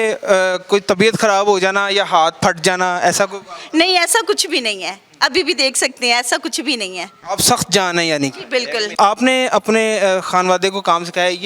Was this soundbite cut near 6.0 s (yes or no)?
no